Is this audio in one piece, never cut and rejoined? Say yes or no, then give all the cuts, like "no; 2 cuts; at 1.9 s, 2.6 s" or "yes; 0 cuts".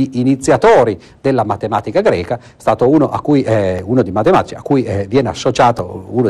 no; 1 cut; at 2.8 s